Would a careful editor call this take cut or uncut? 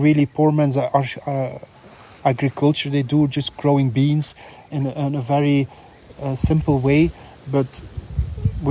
uncut